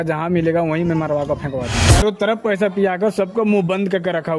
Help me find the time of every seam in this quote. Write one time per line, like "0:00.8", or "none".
0:01.8